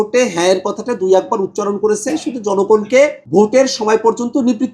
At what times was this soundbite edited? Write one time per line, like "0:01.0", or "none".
0:03.2